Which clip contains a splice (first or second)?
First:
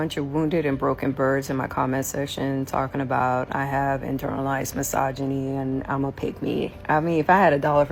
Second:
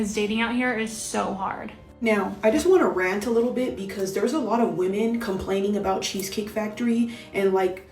second